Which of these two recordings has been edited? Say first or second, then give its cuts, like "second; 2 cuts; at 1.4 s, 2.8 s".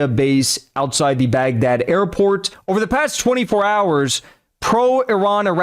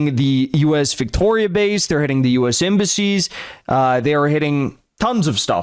first; 1 cut; at 2.5 s